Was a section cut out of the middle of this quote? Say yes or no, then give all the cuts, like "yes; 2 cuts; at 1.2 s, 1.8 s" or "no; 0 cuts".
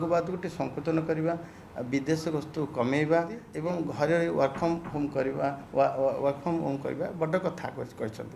yes; 1 cut; at 3.4 s